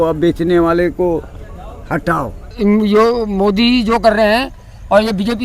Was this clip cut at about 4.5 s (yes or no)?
no